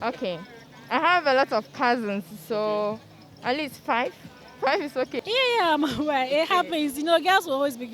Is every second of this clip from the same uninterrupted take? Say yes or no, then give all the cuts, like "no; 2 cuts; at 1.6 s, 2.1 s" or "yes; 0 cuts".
no; 1 cut; at 5.1 s